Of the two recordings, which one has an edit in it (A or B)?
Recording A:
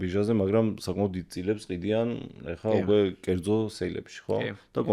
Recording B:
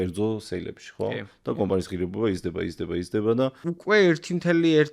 B